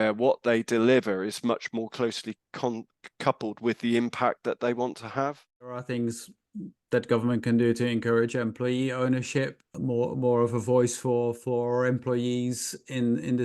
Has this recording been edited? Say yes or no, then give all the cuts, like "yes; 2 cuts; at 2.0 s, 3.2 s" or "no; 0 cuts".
yes; 2 cuts; at 5.9 s, 9.6 s